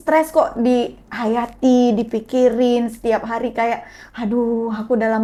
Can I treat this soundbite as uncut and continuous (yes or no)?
yes